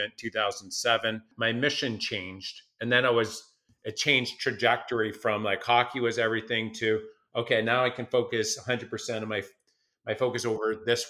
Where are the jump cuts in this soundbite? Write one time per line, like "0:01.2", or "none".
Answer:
0:01.3